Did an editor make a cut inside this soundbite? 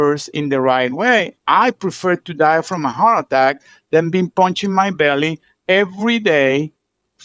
no; 0 cuts

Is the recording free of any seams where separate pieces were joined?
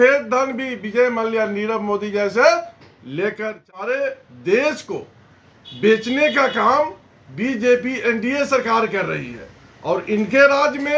no; 1 cut; at 3.6 s

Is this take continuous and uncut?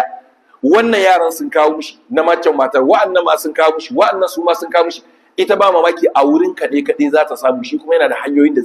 yes; 0 cuts

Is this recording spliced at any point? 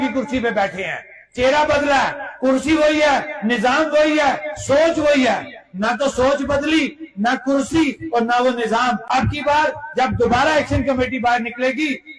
yes; 1 cut; at 9.2 s

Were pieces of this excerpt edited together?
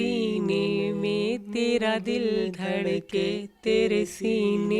no; 0 cuts

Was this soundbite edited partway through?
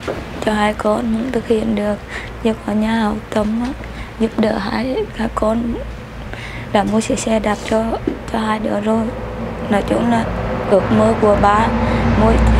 no; 0 cuts

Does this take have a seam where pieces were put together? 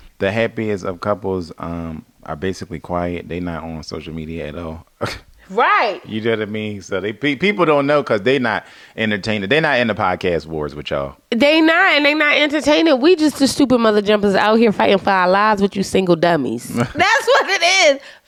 no; 0 cuts

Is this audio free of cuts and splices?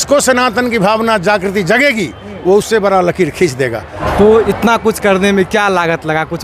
no; 1 cut; at 3.9 s

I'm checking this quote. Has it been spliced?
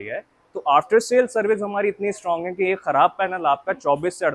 no; 0 cuts

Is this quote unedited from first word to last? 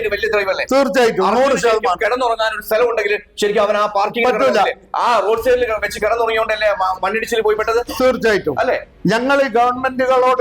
yes; 0 cuts

